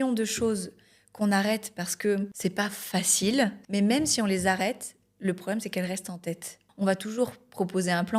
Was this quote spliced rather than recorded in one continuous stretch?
yes; 3 cuts; at 2.3 s, 3.6 s, 6.6 s

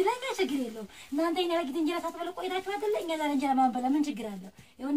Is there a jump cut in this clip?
no; 0 cuts

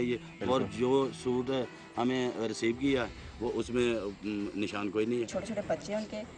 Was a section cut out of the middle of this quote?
yes; 1 cut; at 5.3 s

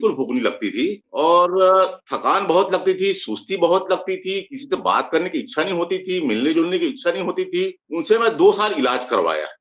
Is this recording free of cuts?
no; 2 cuts; at 1.0 s, 7.8 s

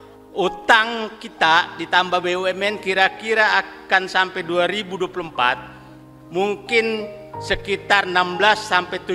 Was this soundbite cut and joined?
no; 0 cuts

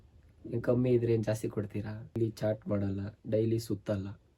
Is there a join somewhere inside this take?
yes; 1 cut; at 2.2 s

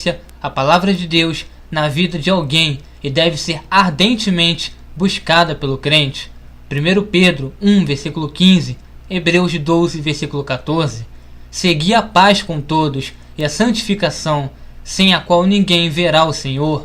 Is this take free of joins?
no; 1 cut; at 10.3 s

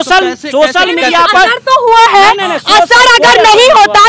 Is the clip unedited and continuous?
yes; 0 cuts

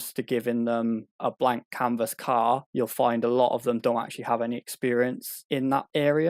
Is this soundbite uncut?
no; 1 cut; at 2.7 s

